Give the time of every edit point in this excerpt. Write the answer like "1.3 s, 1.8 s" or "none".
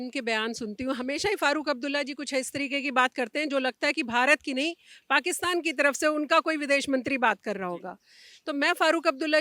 none